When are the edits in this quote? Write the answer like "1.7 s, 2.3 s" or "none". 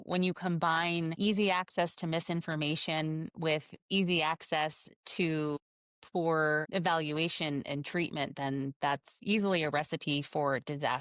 9.1 s

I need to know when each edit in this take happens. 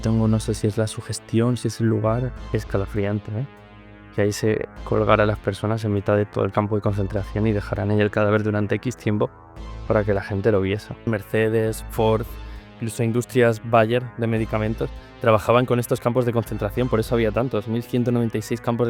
2.3 s, 11.1 s

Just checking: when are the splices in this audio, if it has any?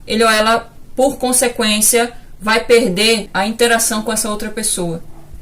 3.3 s

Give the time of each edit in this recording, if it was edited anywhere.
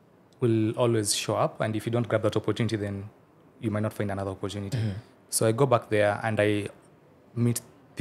none

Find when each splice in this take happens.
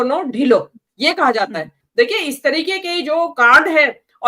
1.8 s

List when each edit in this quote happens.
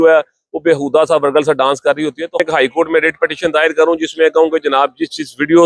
2.4 s

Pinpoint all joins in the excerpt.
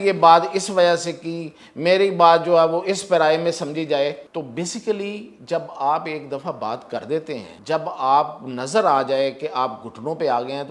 4.2 s, 7.5 s

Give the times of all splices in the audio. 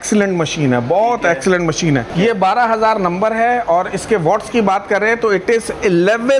2.1 s

